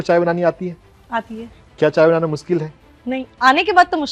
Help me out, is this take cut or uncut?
uncut